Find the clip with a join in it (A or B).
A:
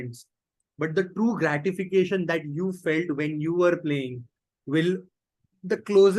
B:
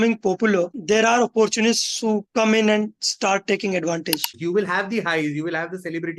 B